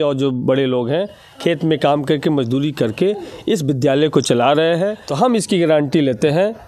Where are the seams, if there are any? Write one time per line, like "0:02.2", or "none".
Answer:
0:05.0